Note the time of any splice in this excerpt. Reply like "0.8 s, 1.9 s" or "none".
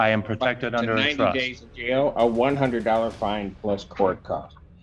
none